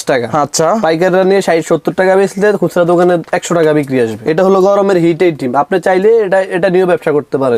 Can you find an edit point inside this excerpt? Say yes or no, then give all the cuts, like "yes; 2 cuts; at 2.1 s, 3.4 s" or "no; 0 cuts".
no; 0 cuts